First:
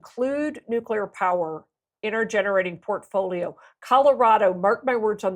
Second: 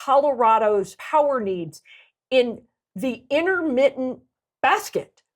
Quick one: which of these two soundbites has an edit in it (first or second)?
second